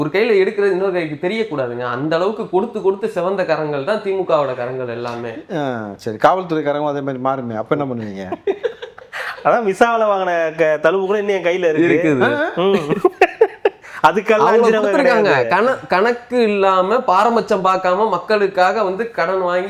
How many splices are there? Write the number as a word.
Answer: zero